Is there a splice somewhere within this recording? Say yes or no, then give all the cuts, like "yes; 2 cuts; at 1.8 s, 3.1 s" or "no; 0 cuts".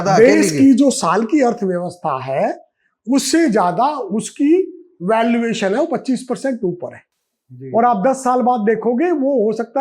no; 0 cuts